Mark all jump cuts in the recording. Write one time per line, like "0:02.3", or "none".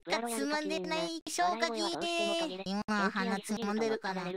0:02.6